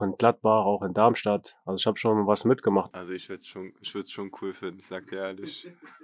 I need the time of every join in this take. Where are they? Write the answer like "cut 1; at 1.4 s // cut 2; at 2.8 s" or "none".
cut 1; at 2.9 s